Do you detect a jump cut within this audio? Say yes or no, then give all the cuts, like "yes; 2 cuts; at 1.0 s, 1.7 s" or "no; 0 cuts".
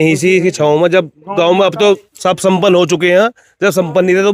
no; 0 cuts